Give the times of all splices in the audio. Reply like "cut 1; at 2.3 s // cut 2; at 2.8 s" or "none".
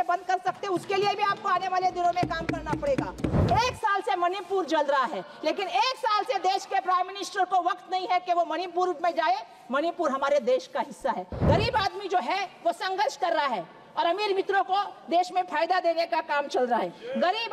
cut 1; at 3.4 s // cut 2; at 11.3 s